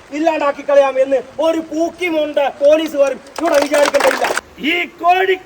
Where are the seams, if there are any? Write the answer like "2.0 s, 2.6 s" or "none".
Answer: 4.4 s